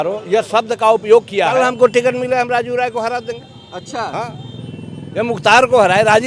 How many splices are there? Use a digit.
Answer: 1